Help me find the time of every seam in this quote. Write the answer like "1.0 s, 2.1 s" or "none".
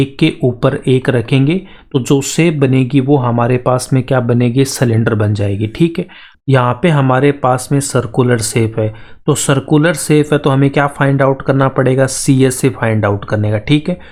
none